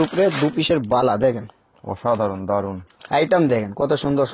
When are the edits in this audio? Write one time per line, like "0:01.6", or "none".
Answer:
0:02.8